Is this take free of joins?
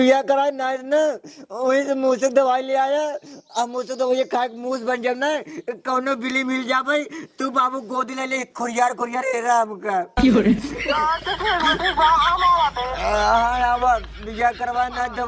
yes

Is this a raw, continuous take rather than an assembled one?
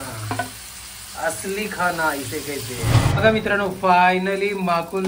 no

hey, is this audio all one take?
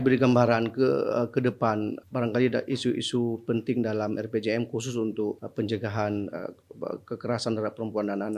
no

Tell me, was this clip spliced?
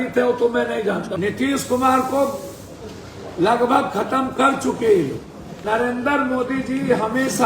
yes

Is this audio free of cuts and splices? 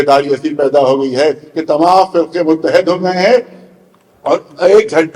yes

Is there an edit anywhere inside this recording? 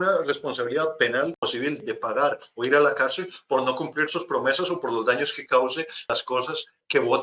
no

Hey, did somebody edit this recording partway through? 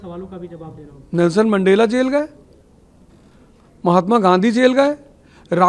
no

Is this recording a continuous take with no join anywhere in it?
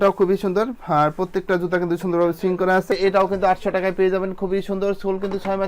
no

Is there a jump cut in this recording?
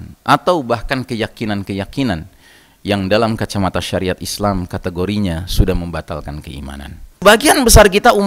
yes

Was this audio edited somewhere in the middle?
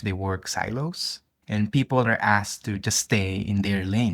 yes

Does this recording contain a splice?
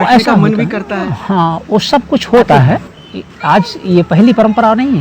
yes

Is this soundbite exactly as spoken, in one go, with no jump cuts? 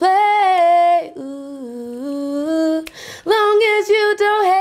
yes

